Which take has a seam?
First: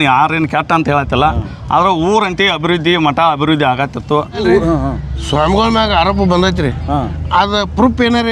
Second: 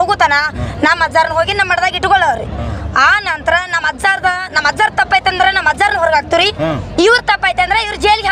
first; 1 cut; at 4.4 s

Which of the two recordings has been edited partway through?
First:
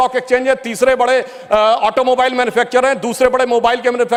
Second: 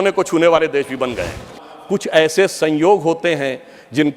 second; 1 cut; at 1.7 s

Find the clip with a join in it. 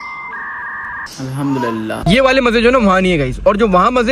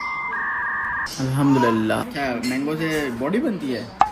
first; 1 cut; at 2.0 s

